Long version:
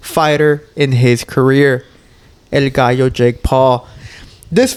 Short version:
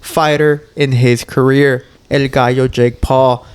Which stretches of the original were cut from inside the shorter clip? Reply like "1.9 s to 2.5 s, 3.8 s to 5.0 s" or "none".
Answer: 1.9 s to 2.3 s

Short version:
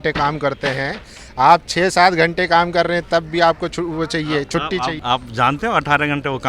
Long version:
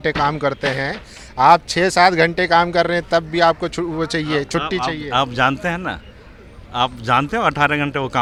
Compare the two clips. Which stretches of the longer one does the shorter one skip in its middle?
5.0 s to 6.7 s

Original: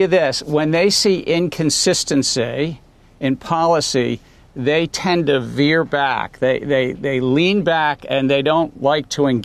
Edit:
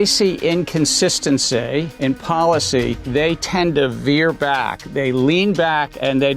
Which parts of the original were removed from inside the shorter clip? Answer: 2.8 s to 3.1 s, 4.2 s to 4.5 s, 6.3 s to 6.9 s

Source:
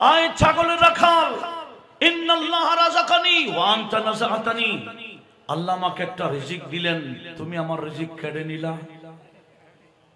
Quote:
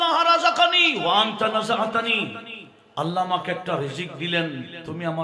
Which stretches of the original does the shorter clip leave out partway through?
none

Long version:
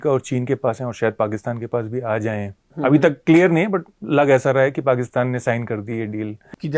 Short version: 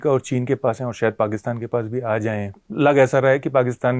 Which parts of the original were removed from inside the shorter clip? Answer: 2.6 s to 3.9 s

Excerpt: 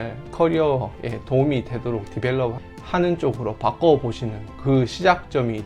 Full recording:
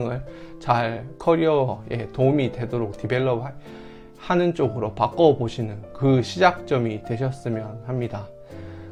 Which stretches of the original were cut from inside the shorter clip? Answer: 3.6 s to 4.1 s

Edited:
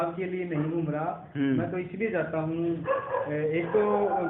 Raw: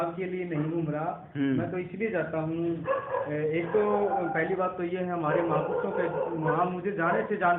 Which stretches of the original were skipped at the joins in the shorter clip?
none

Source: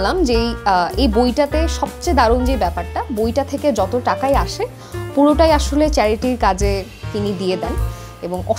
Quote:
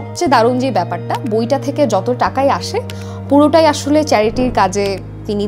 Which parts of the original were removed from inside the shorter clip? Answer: none

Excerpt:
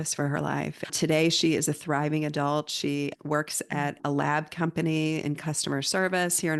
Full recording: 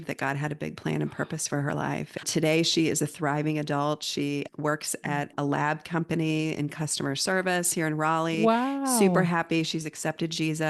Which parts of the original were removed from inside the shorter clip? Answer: none

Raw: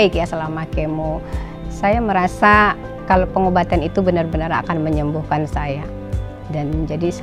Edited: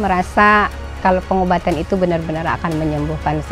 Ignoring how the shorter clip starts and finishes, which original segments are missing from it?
none

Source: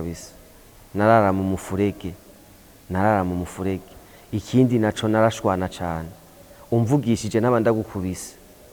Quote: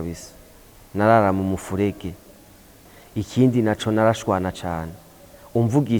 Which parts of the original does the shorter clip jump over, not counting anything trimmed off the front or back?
2.8 s to 3.9 s

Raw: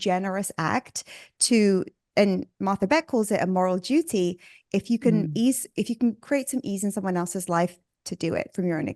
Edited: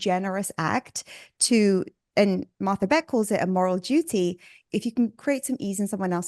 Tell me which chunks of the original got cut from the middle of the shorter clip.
4.6 s to 5.7 s

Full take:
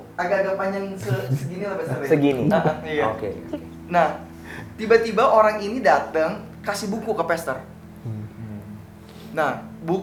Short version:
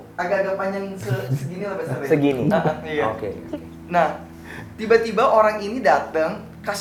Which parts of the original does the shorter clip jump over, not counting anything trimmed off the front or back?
none

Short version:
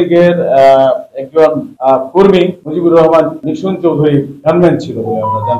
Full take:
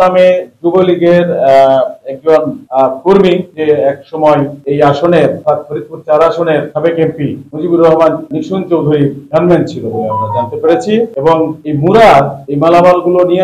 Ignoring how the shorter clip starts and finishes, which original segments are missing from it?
3.5 s to 7.5 s

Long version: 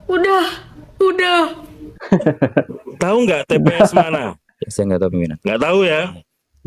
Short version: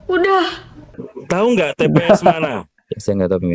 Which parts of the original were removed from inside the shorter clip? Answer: 1.0 s to 2.7 s

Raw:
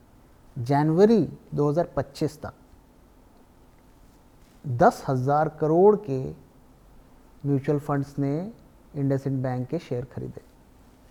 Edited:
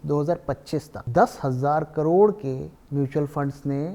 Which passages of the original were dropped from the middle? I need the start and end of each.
2.5 s to 4.6 s, 6.4 s to 7.3 s

